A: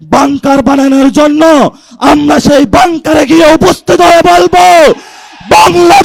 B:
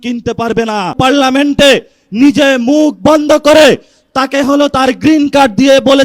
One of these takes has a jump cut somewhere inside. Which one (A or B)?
B